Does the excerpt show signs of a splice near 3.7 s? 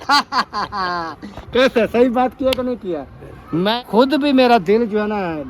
yes; 1 cut; at 3.7 s

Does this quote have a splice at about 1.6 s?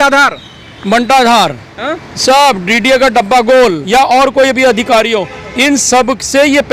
no; 1 cut; at 3.8 s

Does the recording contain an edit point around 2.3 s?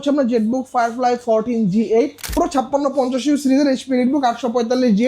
yes; 1 cut; at 2.3 s

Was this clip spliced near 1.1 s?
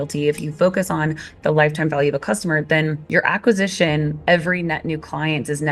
no; 0 cuts

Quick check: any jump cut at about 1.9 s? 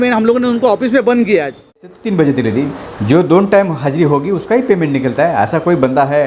yes; 1 cut; at 1.9 s

